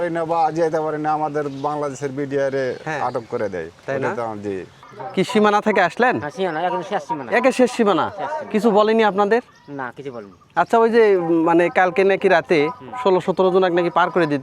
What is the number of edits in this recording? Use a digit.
1